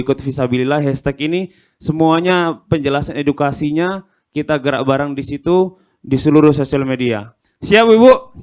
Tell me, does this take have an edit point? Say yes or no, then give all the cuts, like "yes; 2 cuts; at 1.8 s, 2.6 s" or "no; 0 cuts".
no; 0 cuts